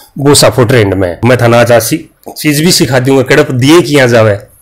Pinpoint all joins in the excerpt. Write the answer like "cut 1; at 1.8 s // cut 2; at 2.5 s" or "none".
cut 1; at 1.2 s